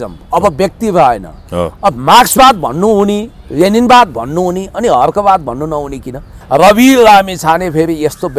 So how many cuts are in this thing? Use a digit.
1